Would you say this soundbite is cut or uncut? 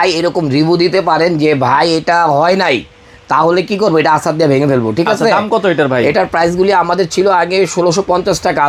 uncut